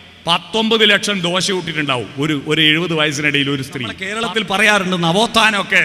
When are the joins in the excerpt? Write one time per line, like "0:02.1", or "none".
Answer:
0:04.0

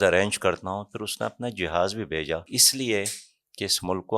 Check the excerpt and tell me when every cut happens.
0:02.5

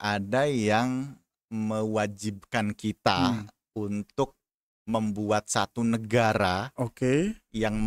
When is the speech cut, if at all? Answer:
none

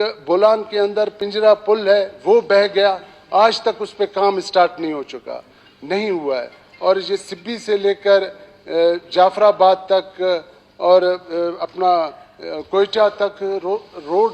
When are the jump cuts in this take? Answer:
0:01.2

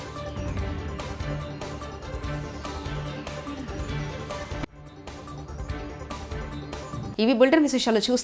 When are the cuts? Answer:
none

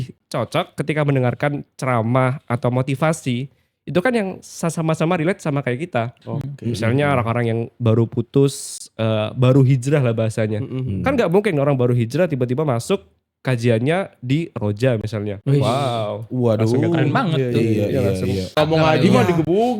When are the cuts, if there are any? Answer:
0:18.6

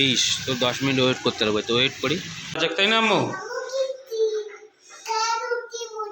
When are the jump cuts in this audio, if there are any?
0:02.6

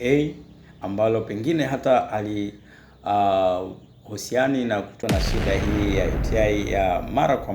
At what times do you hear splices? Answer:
0:05.0

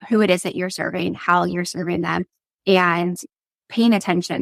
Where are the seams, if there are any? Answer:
none

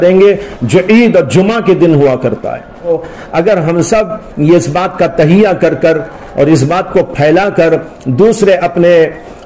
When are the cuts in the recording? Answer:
0:02.9

